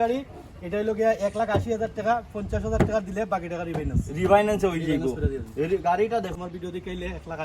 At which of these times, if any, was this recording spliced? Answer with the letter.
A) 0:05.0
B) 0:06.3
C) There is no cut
B